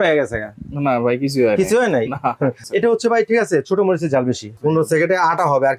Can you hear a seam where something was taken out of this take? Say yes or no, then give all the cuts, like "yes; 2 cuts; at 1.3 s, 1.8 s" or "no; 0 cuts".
yes; 2 cuts; at 2.6 s, 4.5 s